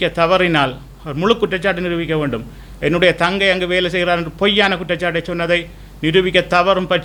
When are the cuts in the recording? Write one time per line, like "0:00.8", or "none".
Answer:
none